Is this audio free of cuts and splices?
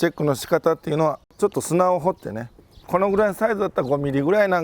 no; 2 cuts; at 1.3 s, 2.8 s

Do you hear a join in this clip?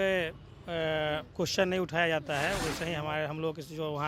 no; 0 cuts

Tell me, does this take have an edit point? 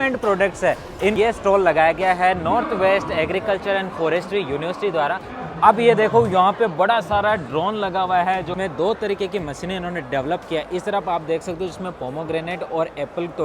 yes; 3 cuts; at 1.1 s, 5.3 s, 8.5 s

